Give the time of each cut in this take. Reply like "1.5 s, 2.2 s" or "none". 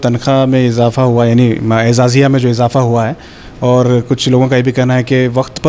none